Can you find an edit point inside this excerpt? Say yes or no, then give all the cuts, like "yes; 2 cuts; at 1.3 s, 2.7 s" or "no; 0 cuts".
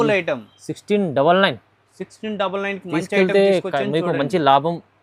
no; 0 cuts